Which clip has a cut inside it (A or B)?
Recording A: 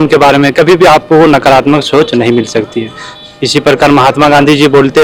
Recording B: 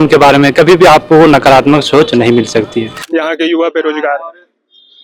B